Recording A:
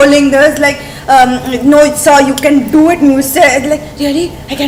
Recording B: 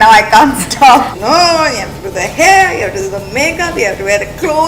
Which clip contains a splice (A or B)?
B